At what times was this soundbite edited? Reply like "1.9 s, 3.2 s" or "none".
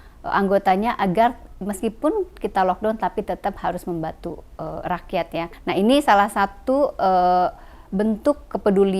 none